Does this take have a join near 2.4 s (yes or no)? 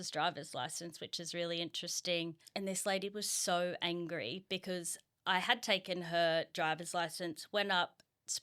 yes